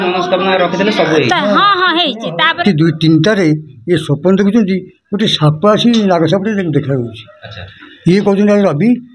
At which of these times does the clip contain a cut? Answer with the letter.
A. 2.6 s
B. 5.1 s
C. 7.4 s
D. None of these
A